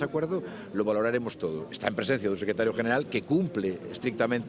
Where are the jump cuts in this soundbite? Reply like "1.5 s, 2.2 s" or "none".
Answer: none